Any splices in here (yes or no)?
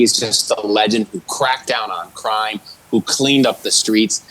no